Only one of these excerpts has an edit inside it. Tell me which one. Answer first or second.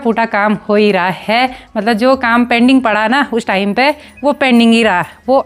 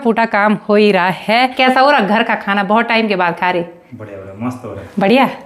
second